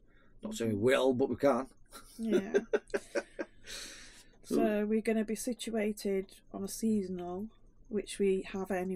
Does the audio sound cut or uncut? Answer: uncut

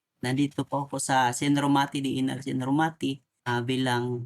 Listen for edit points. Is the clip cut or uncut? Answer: cut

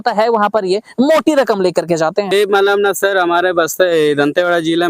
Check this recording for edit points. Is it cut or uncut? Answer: cut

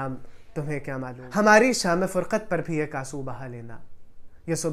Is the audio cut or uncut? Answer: cut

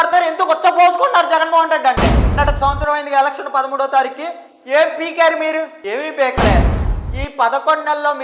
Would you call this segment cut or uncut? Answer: cut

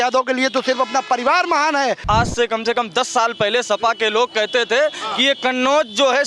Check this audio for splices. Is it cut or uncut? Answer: cut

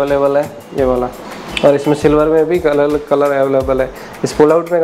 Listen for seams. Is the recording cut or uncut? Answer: uncut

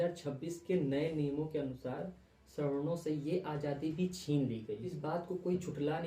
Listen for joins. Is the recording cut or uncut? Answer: uncut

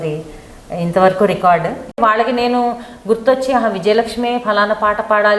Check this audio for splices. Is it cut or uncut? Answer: cut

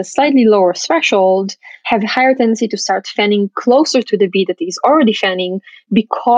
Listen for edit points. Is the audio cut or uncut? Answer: uncut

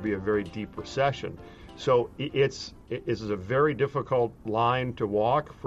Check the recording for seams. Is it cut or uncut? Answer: cut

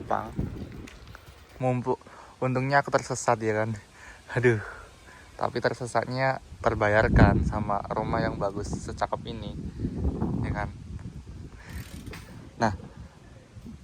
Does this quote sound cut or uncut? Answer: cut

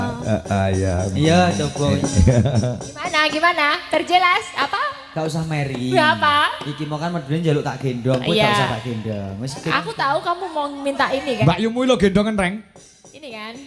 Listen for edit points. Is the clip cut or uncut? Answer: cut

